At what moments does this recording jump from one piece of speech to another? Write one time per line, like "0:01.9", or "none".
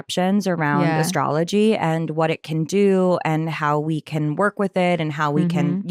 none

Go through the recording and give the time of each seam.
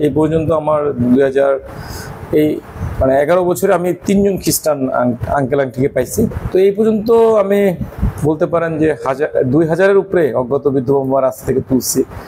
0:06.3

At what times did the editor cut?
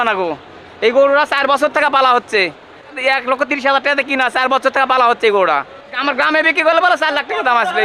0:03.0
0:06.0

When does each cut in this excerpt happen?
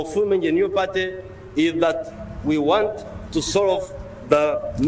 none

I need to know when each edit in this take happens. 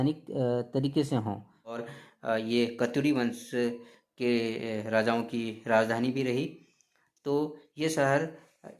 0:01.8

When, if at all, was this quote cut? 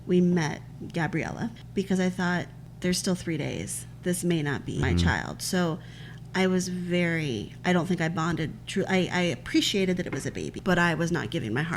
0:01.6
0:02.6
0:04.8
0:10.5

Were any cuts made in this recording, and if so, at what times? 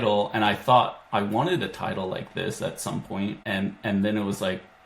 0:03.4

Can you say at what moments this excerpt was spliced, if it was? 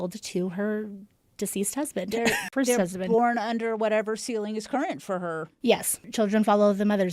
0:02.5

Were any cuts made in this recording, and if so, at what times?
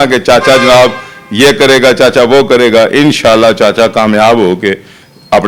none

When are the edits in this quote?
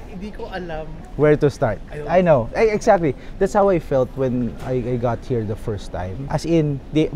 0:01.0
0:06.2

